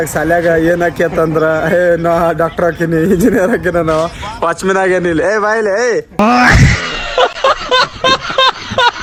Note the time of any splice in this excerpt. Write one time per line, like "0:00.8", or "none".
none